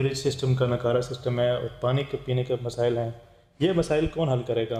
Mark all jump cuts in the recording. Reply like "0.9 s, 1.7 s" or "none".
none